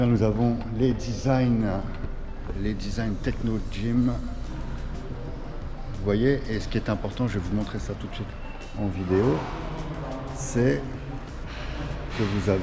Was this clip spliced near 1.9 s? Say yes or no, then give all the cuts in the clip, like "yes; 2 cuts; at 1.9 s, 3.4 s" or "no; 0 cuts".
no; 0 cuts